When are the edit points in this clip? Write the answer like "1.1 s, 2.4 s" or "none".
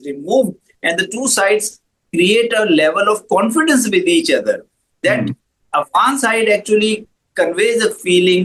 none